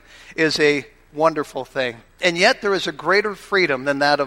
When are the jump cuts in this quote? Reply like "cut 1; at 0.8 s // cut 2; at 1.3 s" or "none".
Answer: cut 1; at 2.2 s